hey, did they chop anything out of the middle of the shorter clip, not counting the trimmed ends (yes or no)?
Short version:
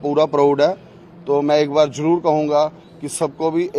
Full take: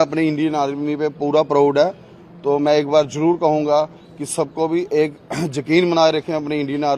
no